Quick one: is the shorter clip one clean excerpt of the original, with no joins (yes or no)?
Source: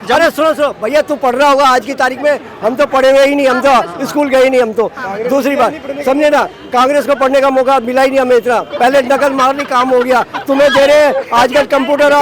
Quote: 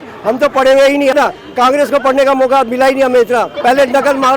no